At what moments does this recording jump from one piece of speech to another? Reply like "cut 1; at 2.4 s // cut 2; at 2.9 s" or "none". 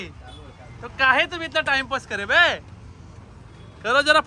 none